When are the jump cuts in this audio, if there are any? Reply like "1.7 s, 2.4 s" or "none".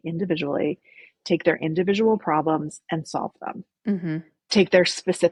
none